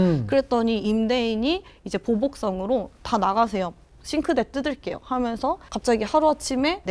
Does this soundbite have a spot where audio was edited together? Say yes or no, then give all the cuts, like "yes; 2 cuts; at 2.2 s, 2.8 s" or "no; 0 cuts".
yes; 1 cut; at 5.7 s